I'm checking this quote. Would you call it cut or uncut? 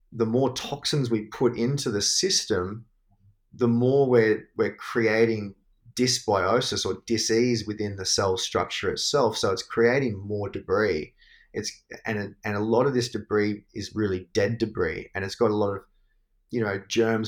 uncut